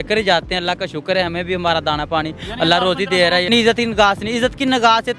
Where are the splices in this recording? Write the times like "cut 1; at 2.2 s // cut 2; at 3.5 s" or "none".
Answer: cut 1; at 3.5 s